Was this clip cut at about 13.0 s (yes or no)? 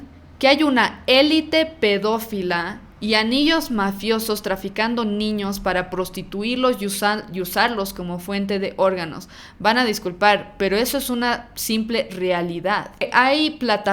yes